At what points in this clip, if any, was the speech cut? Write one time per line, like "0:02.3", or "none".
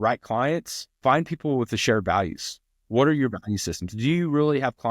0:00.9

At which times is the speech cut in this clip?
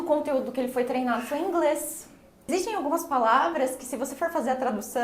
0:02.5

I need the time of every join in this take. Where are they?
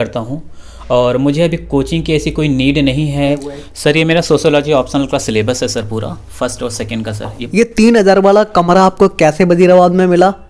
0:03.5
0:07.4

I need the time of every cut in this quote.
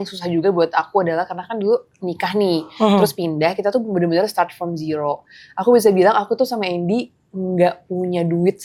none

